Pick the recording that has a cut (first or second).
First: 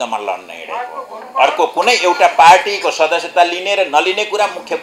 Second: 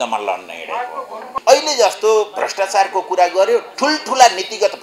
second